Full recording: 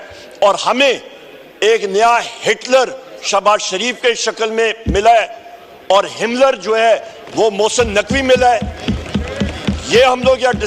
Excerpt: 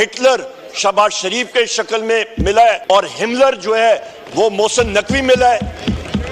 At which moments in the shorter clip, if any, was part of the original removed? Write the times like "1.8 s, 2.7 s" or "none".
2.8 s